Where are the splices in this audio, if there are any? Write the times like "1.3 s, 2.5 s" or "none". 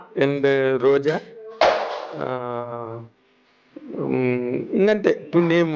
none